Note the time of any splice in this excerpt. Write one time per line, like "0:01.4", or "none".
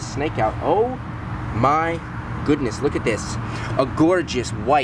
none